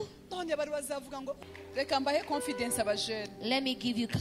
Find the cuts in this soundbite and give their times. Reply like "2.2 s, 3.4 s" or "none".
1.4 s